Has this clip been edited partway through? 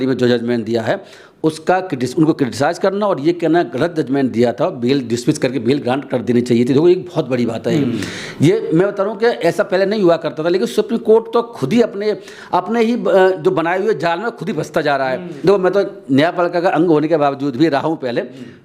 yes; 1 cut; at 15.3 s

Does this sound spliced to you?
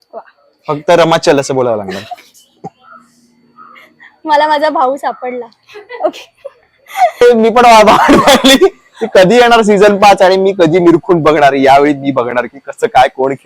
yes; 1 cut; at 7.2 s

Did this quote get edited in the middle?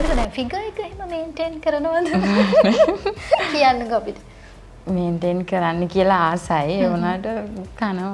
no; 0 cuts

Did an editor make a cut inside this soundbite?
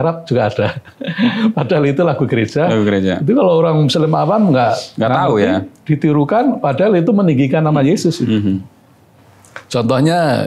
no; 0 cuts

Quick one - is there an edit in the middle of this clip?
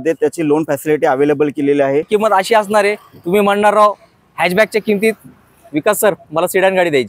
yes; 1 cut; at 2.1 s

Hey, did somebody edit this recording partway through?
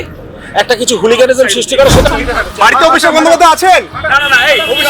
no; 0 cuts

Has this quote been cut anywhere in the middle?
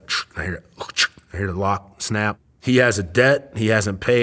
yes; 1 cut; at 2.5 s

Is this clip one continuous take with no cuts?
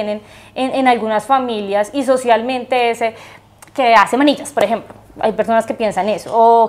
yes; 0 cuts

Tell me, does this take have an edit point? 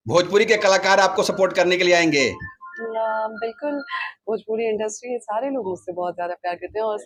no; 0 cuts

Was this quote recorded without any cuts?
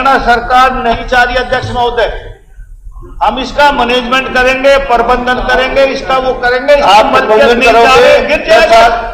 yes; 0 cuts

